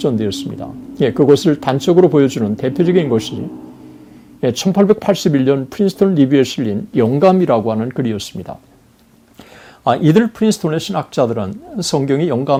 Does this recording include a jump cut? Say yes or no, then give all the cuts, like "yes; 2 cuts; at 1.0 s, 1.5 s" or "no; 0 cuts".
no; 0 cuts